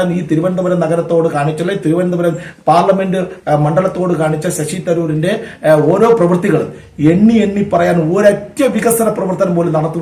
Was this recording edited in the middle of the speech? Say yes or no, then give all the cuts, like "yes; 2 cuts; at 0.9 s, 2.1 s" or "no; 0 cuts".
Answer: no; 0 cuts